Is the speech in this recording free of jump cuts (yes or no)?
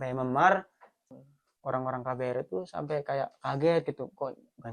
no